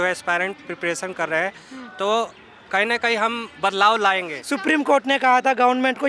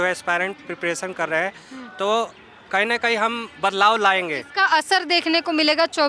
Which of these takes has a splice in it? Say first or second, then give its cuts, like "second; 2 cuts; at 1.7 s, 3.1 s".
first; 1 cut; at 4.3 s